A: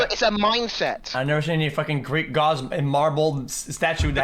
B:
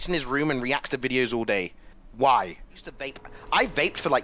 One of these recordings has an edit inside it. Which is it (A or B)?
B